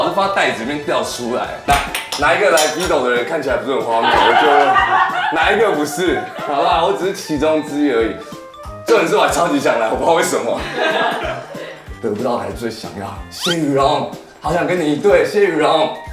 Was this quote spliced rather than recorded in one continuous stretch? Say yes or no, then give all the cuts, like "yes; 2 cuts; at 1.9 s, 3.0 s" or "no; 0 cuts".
yes; 2 cuts; at 1.6 s, 11.8 s